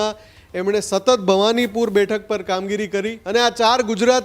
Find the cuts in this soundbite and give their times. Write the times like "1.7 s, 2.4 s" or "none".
3.2 s